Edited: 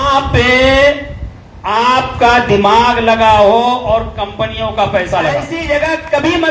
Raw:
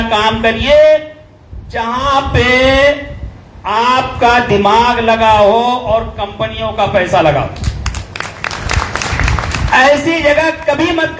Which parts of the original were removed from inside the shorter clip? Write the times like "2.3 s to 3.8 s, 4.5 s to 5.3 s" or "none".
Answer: 7.5 s to 10.1 s